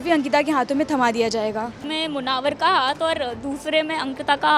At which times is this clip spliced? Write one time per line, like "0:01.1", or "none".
0:01.8